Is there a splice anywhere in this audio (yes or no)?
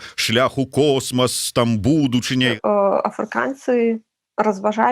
yes